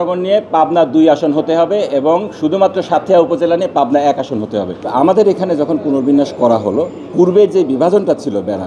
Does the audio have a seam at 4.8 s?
yes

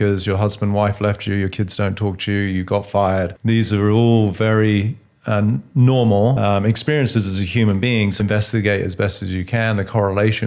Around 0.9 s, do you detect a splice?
no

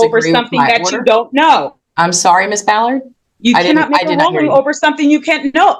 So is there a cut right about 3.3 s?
no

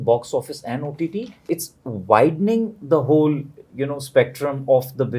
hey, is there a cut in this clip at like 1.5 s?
yes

